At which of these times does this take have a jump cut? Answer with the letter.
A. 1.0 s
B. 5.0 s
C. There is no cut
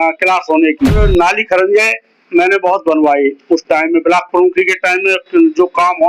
A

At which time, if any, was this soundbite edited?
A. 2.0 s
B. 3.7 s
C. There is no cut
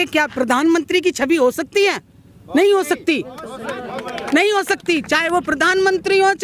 C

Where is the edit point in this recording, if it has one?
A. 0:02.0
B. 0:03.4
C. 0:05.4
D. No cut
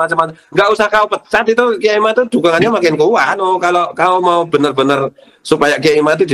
B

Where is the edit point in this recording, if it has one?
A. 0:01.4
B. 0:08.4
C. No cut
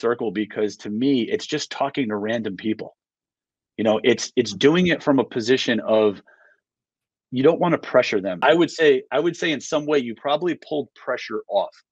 B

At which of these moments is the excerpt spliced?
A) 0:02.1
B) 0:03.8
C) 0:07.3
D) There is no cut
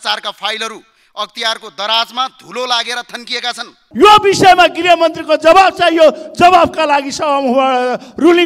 B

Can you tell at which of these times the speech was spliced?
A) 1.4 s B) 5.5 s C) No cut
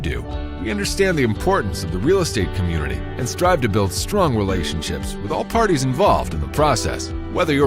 C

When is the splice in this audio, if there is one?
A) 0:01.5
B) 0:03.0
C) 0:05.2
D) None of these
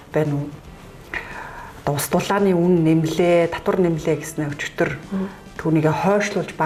D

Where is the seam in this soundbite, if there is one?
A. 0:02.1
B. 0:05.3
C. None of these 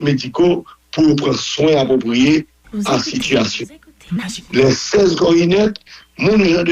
C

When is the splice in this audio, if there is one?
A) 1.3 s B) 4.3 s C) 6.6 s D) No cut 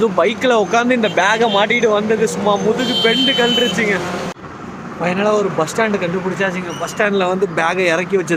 B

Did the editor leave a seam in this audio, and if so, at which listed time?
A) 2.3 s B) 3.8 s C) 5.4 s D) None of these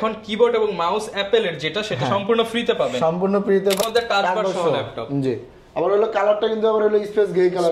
B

